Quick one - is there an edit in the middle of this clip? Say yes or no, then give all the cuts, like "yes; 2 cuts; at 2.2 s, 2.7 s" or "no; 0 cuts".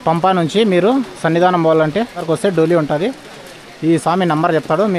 yes; 1 cut; at 2.2 s